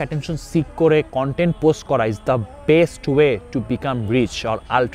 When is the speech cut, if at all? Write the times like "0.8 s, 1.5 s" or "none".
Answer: none